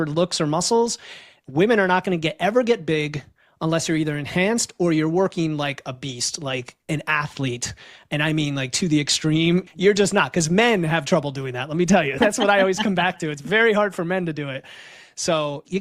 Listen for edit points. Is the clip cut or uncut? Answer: cut